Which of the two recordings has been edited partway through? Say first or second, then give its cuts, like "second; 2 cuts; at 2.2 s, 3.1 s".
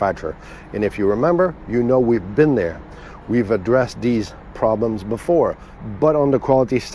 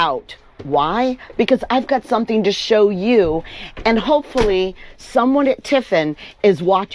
first; 1 cut; at 5.7 s